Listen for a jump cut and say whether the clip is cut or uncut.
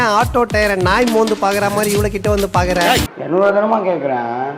cut